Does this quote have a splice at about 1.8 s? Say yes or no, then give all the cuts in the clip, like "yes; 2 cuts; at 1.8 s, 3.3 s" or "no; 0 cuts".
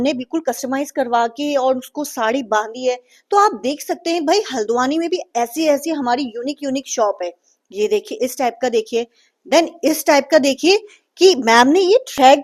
no; 0 cuts